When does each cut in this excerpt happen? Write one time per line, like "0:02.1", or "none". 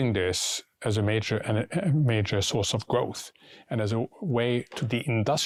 none